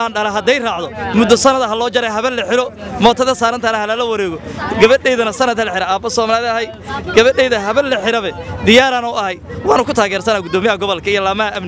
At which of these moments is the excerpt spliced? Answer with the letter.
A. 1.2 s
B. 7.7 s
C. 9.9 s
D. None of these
D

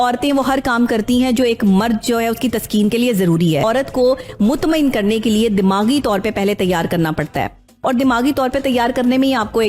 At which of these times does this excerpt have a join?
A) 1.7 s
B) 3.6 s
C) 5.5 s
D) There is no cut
B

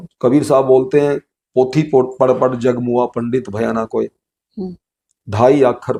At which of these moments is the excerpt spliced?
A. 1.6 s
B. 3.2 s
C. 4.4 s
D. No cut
D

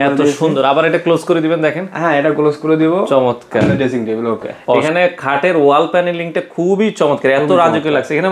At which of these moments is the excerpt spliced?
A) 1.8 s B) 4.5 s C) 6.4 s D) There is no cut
B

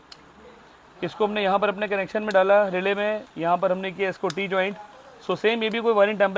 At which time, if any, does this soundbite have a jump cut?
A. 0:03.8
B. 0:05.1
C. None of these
C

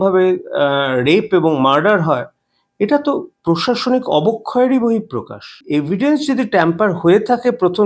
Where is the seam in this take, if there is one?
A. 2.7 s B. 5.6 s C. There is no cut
B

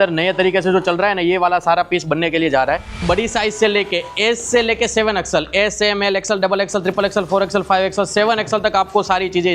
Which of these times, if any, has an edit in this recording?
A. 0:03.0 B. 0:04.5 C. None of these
A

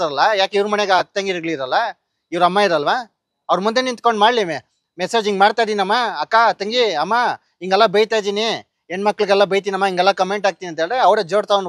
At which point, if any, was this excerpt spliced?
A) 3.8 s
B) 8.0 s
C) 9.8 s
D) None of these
D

